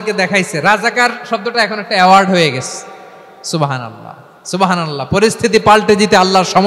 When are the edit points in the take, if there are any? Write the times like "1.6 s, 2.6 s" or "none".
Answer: none